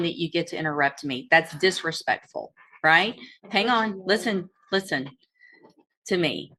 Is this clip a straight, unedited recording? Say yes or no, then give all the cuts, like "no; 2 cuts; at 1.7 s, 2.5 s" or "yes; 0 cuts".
yes; 0 cuts